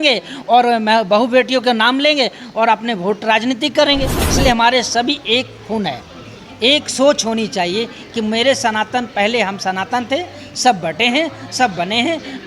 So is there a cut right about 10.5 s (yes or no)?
no